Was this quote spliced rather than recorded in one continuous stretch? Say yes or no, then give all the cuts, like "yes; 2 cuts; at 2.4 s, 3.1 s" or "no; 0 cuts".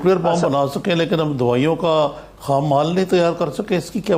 no; 0 cuts